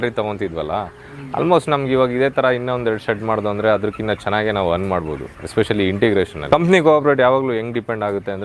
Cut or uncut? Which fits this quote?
cut